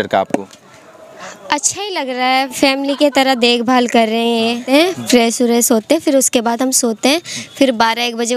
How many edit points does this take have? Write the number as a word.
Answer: one